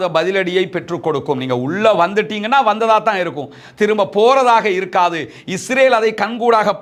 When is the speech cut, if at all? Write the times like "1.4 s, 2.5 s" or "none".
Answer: none